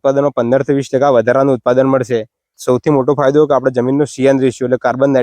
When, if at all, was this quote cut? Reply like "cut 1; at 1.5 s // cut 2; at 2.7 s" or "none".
cut 1; at 2.6 s